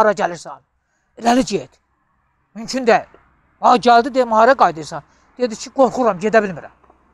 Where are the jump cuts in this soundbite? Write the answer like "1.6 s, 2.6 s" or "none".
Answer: none